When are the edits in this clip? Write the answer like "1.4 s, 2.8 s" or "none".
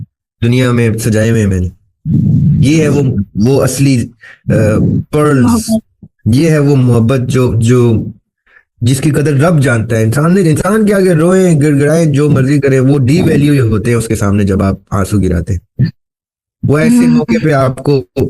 none